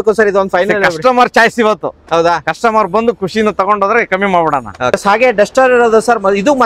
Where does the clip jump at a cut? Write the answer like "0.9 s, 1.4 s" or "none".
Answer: none